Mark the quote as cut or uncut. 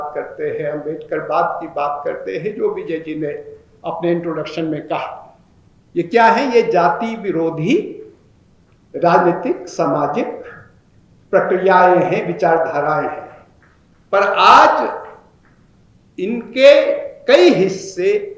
uncut